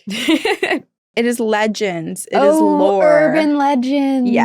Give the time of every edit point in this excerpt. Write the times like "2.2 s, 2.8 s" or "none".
1.0 s